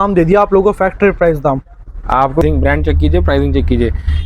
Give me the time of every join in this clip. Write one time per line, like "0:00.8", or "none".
0:02.4